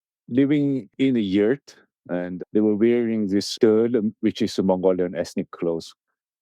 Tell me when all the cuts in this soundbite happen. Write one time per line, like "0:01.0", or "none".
0:02.4
0:03.5

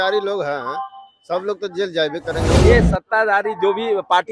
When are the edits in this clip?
0:02.7

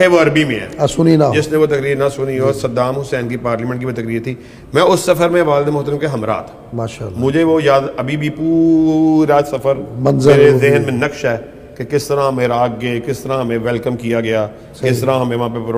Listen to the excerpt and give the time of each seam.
none

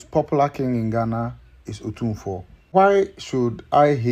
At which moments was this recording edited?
0:02.7

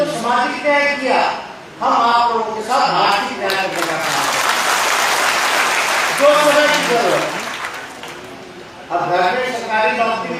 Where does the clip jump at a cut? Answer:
none

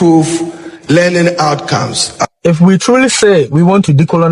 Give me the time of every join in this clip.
0:02.2

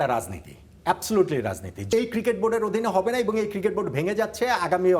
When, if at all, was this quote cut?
0:01.8

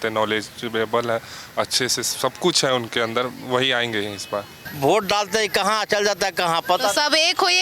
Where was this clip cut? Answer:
0:04.7

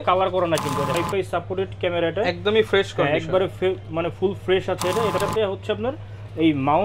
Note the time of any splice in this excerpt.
0:01.0
0:05.2

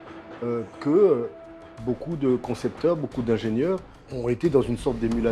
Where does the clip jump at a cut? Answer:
0:04.0

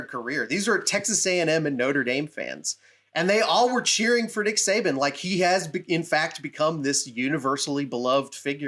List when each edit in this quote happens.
none

